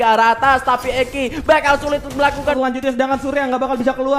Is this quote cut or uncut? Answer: cut